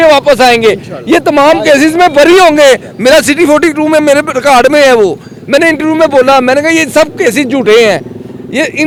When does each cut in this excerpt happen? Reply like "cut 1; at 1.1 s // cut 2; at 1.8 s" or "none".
none